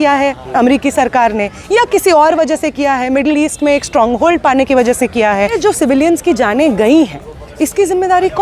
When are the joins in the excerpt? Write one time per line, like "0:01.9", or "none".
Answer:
0:05.5